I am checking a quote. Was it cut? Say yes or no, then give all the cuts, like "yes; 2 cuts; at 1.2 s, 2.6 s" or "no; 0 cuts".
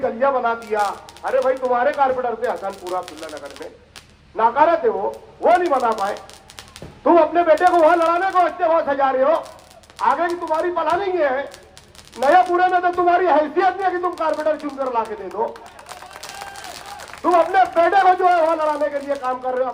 no; 0 cuts